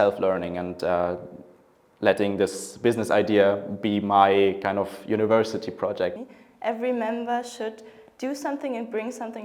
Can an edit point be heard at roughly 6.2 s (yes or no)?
yes